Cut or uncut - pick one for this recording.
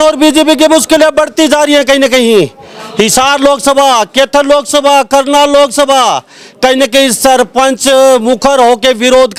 uncut